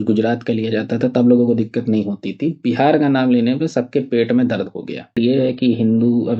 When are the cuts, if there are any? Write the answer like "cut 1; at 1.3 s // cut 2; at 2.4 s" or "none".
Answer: cut 1; at 5.2 s